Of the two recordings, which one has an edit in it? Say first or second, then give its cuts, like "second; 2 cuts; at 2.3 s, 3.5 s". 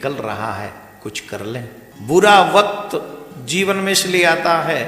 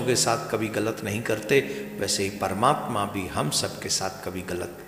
first; 1 cut; at 1.9 s